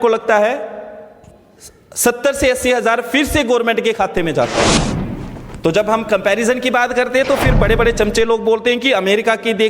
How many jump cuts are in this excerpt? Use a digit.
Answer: 1